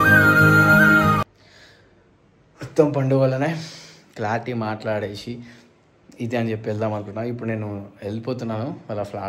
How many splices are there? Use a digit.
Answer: 0